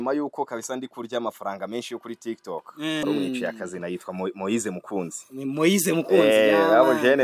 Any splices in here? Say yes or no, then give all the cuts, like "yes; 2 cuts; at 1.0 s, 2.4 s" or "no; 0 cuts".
yes; 1 cut; at 3.0 s